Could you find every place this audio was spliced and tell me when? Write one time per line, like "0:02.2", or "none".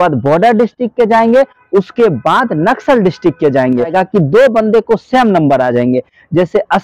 0:03.9